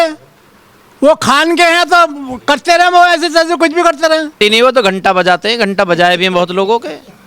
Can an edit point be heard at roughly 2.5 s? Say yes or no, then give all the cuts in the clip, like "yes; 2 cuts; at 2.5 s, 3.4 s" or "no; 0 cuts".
no; 1 cut; at 4.3 s